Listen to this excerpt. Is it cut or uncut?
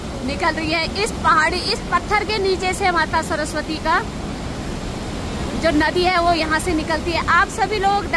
uncut